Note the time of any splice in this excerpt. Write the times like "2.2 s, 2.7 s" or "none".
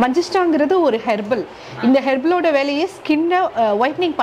3.3 s